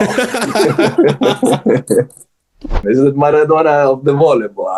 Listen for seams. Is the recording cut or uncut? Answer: cut